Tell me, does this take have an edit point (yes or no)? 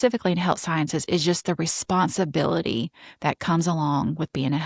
no